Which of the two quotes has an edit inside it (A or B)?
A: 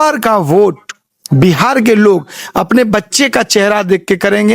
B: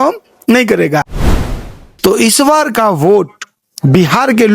B